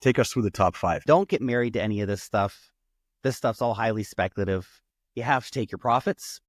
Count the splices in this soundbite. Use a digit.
2